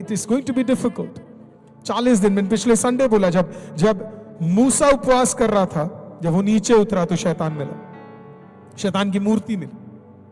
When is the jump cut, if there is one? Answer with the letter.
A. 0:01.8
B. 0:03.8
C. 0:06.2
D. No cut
D